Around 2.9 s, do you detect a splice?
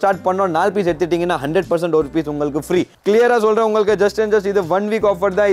yes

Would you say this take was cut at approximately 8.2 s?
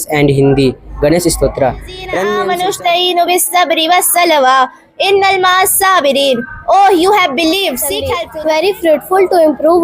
yes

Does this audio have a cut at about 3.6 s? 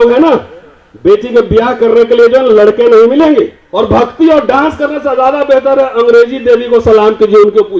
yes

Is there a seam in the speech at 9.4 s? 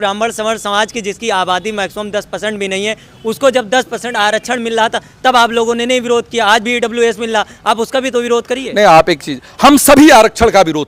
no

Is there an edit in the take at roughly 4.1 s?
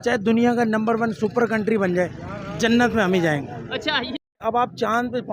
yes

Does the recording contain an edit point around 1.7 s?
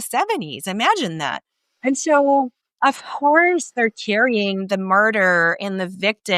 no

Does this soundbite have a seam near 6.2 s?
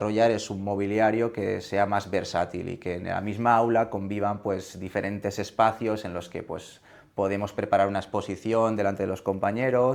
no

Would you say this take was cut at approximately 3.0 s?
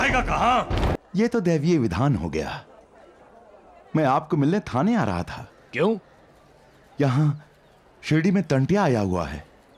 no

